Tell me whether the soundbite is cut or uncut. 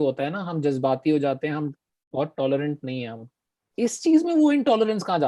cut